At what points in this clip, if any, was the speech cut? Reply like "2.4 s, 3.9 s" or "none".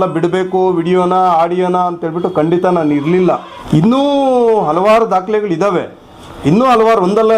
3.5 s